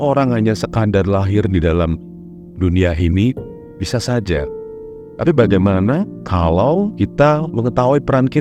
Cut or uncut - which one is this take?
cut